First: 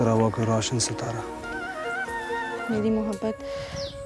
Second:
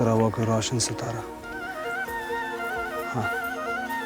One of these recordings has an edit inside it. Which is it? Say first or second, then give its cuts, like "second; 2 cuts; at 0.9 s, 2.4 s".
first; 1 cut; at 2.6 s